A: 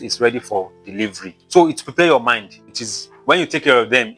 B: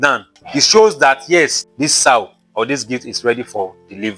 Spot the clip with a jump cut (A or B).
A